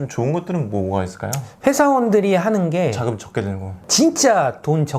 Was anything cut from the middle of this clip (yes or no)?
no